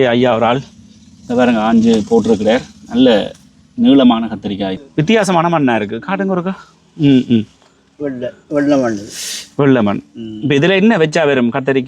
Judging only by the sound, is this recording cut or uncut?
cut